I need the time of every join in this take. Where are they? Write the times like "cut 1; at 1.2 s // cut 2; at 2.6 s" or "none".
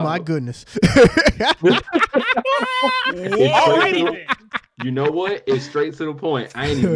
none